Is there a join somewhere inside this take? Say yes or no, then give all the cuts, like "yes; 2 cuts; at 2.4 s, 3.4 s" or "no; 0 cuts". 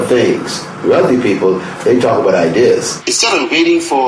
yes; 1 cut; at 3.0 s